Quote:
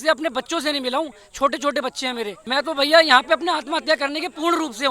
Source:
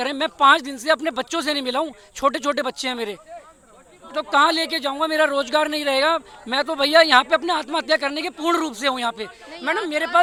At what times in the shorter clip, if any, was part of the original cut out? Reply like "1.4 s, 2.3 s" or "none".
2.4 s